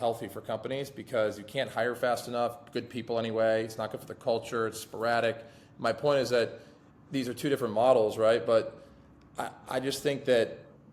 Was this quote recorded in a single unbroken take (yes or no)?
yes